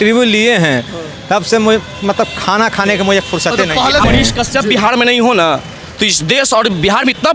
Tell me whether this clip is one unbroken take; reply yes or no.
no